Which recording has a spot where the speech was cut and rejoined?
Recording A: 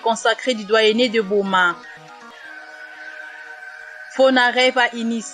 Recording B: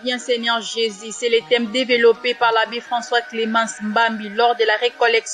A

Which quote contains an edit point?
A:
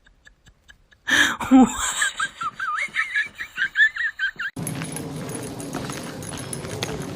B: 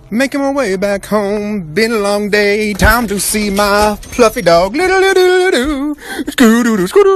A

